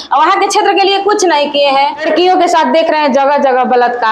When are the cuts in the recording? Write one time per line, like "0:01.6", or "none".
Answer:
0:02.0